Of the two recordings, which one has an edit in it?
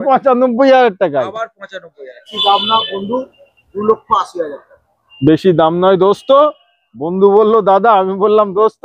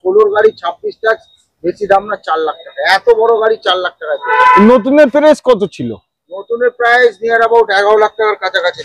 first; 1 cut; at 2.3 s

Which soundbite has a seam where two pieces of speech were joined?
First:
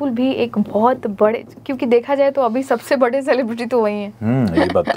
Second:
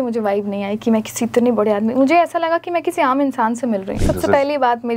second; 1 cut; at 4.0 s

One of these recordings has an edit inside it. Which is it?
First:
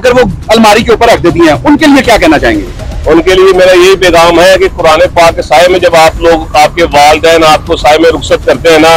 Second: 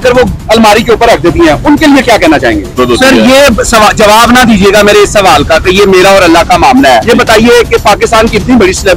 second; 1 cut; at 2.8 s

